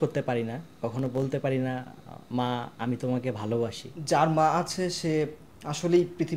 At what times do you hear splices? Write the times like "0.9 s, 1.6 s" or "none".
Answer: 2.7 s, 3.9 s